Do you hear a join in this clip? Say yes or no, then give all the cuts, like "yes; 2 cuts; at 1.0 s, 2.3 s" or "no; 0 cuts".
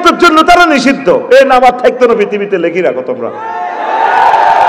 no; 0 cuts